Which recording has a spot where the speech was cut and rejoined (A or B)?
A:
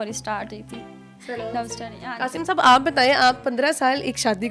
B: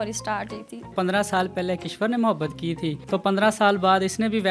B